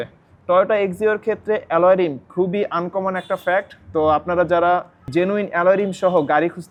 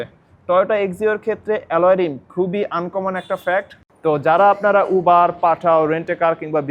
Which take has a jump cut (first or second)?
second